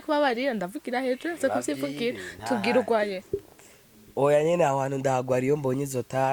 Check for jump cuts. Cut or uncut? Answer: uncut